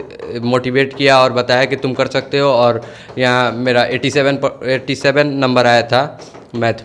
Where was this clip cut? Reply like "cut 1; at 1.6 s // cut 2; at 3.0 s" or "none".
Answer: none